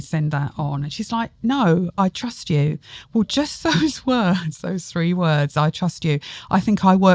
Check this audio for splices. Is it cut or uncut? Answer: uncut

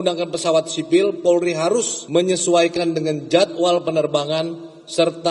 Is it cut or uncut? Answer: cut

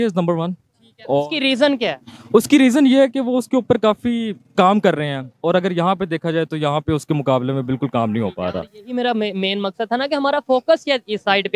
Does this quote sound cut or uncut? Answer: uncut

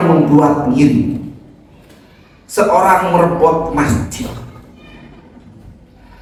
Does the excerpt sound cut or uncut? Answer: uncut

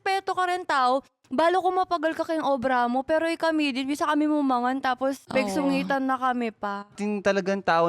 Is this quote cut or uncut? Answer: cut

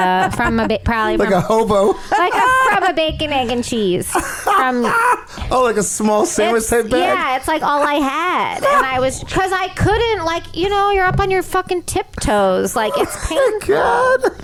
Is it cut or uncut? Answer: uncut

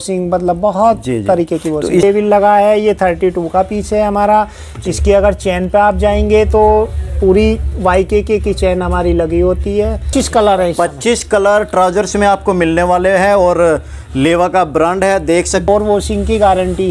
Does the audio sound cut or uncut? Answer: cut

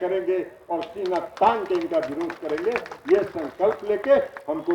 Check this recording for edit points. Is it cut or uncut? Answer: uncut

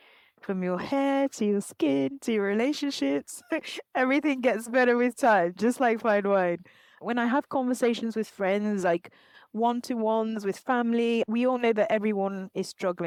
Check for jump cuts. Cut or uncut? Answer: uncut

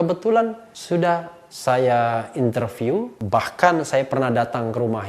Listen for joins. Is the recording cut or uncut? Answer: cut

